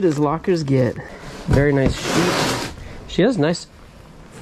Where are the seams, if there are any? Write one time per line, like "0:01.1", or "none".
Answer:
0:01.1

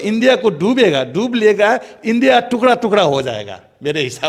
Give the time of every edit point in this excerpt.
none

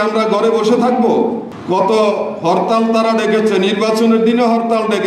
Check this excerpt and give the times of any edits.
0:01.5

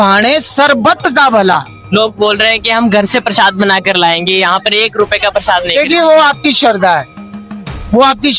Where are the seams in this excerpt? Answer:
0:01.8

